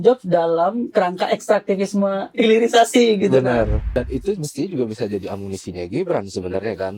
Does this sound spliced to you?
yes; 1 cut; at 3.8 s

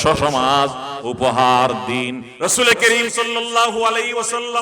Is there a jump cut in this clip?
yes; 1 cut; at 2.2 s

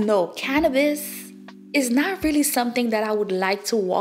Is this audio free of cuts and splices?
yes; 0 cuts

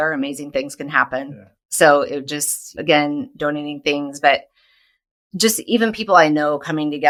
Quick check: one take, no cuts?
yes; 0 cuts

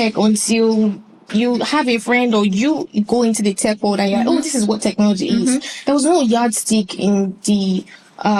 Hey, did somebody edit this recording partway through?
no; 0 cuts

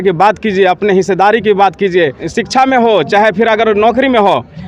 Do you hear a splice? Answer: yes; 1 cut; at 2.2 s

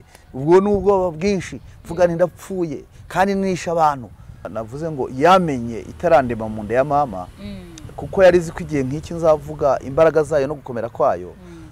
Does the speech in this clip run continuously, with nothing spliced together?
yes; 0 cuts

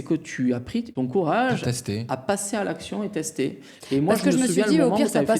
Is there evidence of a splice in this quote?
yes; 1 cut; at 0.9 s

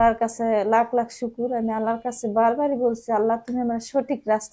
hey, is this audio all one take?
yes; 0 cuts

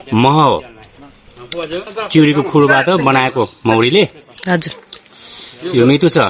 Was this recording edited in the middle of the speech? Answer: yes; 1 cut; at 1.9 s

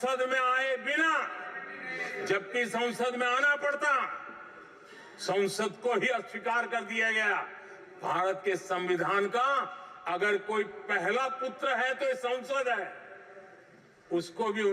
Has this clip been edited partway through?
no; 0 cuts

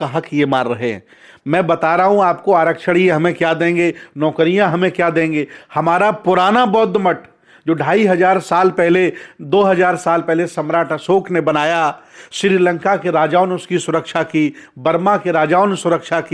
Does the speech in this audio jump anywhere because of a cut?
no; 0 cuts

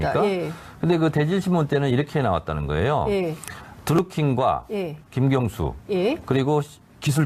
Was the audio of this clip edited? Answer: yes; 1 cut; at 4.7 s

